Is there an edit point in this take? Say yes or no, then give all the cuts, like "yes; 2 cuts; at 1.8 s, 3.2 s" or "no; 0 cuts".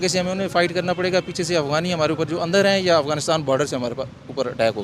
no; 0 cuts